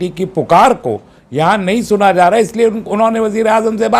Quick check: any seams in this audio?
no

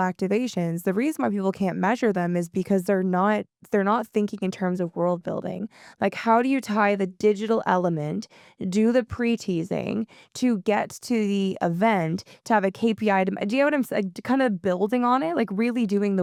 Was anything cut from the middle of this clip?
no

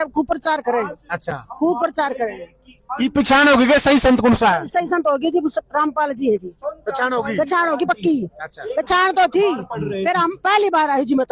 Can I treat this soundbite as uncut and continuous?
yes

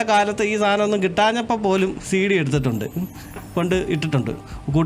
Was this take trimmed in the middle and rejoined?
no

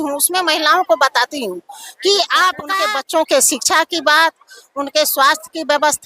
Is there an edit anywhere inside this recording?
yes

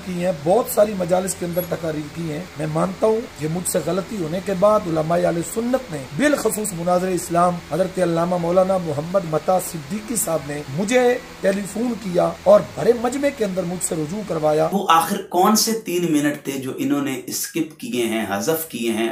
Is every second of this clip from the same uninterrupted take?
no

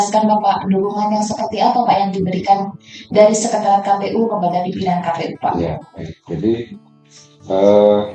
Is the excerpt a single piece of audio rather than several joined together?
yes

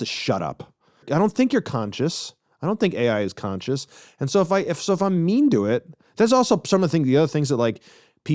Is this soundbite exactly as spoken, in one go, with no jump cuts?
no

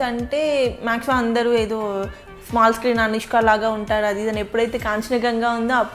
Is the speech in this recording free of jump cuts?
yes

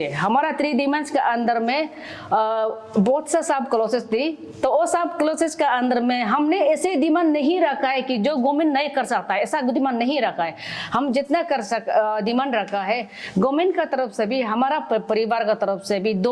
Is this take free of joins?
yes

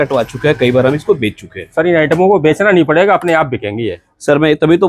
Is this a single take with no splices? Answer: yes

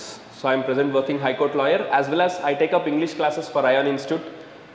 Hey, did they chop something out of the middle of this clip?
no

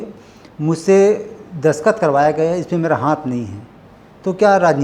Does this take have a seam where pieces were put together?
no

